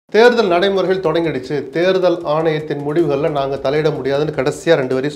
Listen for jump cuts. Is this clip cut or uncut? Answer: uncut